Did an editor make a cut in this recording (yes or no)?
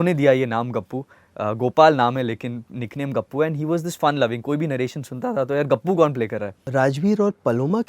yes